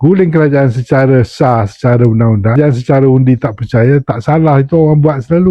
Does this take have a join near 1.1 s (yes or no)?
no